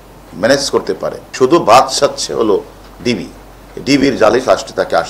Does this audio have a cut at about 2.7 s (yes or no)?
no